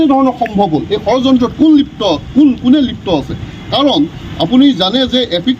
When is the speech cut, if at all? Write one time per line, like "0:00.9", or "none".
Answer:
none